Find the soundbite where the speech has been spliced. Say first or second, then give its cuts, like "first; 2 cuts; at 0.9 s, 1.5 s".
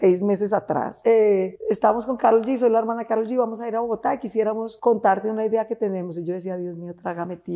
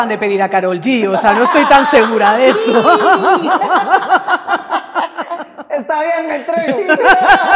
first; 3 cuts; at 0.9 s, 1.5 s, 4.7 s